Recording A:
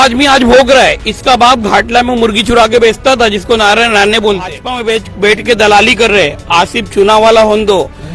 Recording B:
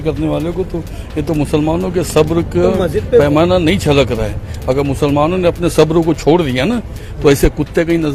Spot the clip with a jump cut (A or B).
A